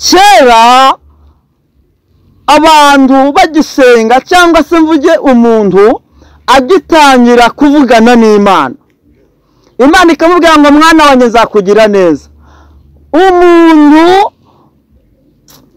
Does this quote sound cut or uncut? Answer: uncut